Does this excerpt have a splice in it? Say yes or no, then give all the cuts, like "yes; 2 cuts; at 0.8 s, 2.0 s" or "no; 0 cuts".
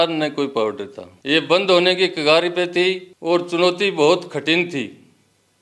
no; 0 cuts